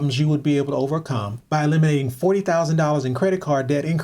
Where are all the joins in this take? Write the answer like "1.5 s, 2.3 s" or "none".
1.3 s